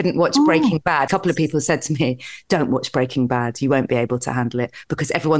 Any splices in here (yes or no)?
yes